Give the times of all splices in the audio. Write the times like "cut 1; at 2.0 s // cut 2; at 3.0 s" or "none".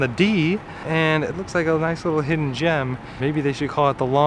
cut 1; at 3.2 s